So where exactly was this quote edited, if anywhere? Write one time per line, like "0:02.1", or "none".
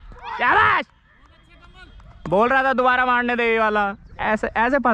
none